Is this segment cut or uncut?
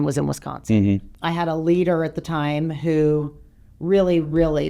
cut